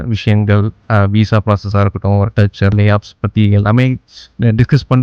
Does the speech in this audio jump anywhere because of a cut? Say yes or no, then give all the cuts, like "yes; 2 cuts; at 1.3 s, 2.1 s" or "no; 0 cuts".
yes; 1 cut; at 2.7 s